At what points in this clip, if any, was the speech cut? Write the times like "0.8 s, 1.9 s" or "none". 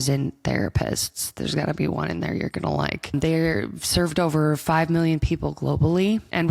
none